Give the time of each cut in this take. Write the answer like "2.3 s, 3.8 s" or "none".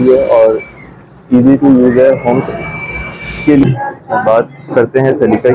3.6 s